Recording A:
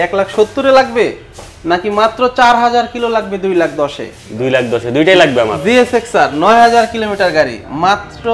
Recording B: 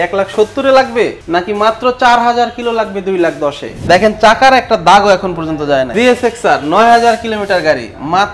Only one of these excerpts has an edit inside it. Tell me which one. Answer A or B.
B